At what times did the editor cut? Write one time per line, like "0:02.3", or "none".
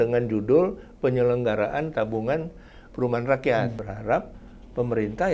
0:03.9

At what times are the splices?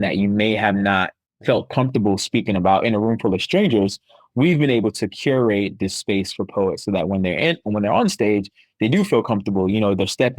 0:01.2

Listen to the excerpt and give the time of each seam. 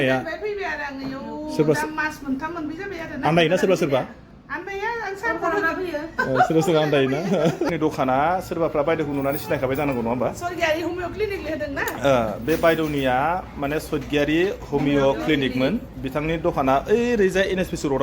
0:07.7

